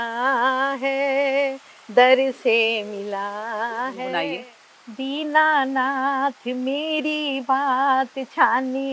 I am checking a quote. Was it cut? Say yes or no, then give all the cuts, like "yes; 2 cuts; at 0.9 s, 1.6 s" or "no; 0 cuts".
yes; 1 cut; at 4.1 s